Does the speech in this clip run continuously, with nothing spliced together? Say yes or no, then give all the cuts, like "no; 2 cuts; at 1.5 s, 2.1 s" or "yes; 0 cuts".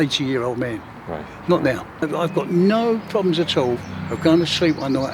no; 1 cut; at 2.1 s